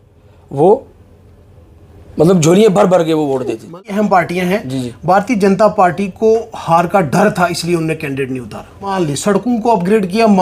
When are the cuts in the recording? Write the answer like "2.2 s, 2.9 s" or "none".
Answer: 3.8 s, 8.9 s